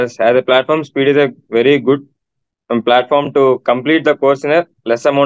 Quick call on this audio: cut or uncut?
uncut